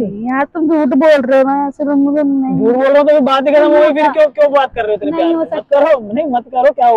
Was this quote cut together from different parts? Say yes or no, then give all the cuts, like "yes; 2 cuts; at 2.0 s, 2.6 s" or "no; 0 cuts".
no; 0 cuts